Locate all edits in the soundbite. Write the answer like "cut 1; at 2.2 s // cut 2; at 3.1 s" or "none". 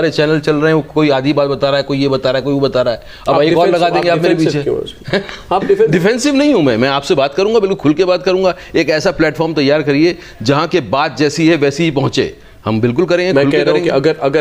none